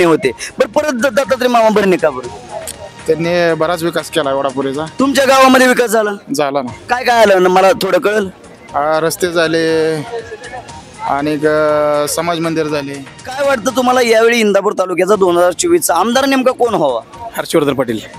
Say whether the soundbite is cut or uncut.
cut